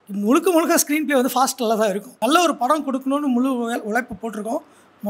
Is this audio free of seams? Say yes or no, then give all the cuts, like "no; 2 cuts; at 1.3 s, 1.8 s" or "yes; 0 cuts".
no; 1 cut; at 2.1 s